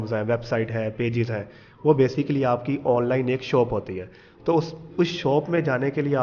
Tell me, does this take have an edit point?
no; 0 cuts

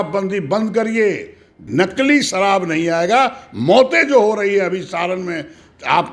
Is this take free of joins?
no; 1 cut; at 1.7 s

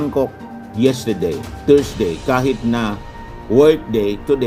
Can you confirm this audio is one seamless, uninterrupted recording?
yes; 0 cuts

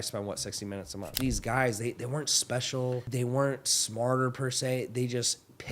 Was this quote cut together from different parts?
yes; 2 cuts; at 1.2 s, 3.1 s

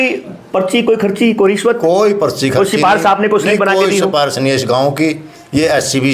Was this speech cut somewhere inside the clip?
no; 0 cuts

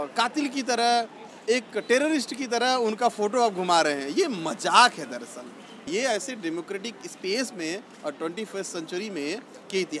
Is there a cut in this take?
no; 0 cuts

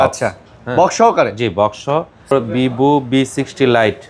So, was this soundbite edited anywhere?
yes; 1 cut; at 2.3 s

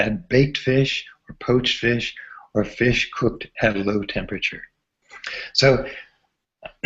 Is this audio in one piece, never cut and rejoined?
yes; 0 cuts

